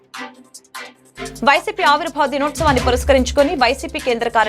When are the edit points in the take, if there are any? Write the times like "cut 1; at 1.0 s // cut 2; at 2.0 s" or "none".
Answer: cut 1; at 1.0 s